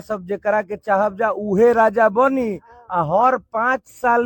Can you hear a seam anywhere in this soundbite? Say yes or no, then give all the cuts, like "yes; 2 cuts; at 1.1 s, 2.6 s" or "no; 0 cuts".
no; 0 cuts